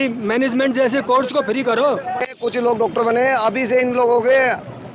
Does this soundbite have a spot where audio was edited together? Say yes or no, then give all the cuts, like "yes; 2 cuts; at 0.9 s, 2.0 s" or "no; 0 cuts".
yes; 1 cut; at 2.3 s